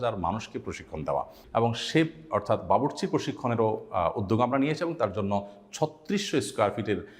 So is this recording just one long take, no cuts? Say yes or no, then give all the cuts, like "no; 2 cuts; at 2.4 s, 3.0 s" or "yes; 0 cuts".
no; 1 cut; at 1.4 s